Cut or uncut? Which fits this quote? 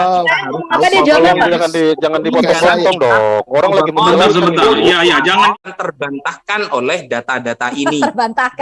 cut